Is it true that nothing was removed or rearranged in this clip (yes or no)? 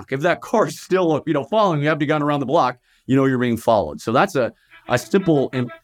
yes